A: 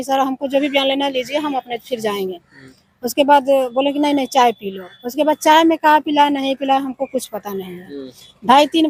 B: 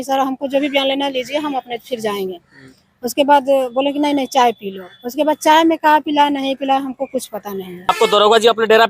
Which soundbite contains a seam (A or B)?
B